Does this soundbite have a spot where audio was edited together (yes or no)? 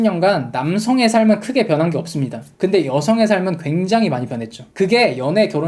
yes